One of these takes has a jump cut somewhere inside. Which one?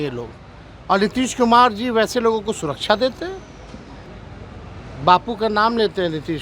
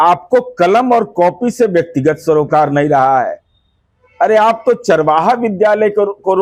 first; 1 cut; at 4.1 s

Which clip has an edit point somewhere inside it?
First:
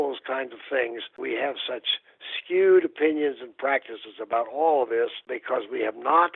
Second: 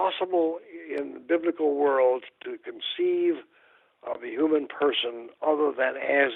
first; 2 cuts; at 1.2 s, 5.3 s

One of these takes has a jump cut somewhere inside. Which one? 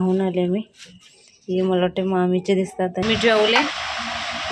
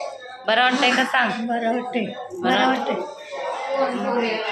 first; 1 cut; at 3.0 s

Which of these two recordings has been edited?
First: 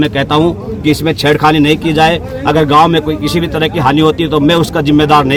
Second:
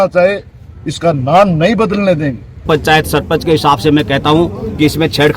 second; 1 cut; at 2.7 s

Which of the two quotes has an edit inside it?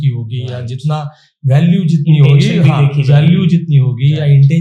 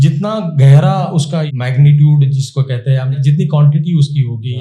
second; 2 cuts; at 1.5 s, 3.2 s

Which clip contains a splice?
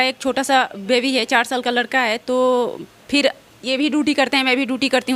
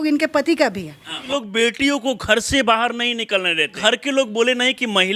second; 2 cuts; at 1.2 s, 3.8 s

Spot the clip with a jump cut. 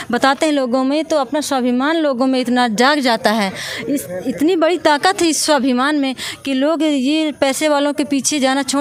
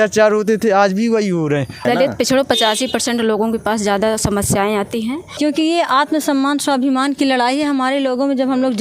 second; 2 cuts; at 1.8 s, 5.2 s

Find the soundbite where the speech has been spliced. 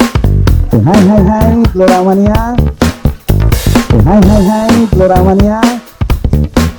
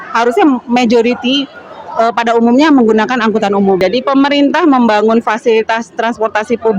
second; 1 cut; at 3.8 s

